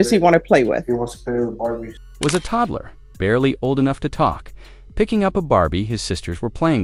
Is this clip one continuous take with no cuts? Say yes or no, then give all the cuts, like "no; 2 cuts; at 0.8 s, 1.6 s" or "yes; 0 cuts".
yes; 0 cuts